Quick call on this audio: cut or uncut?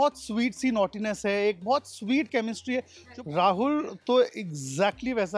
cut